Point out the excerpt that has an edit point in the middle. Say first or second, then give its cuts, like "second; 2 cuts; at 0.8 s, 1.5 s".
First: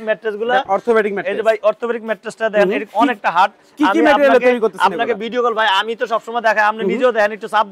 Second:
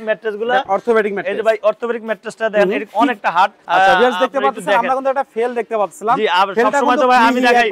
second; 1 cut; at 3.6 s